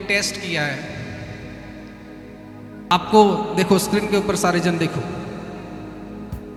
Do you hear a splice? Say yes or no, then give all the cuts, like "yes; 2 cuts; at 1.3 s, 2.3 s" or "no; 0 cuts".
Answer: no; 0 cuts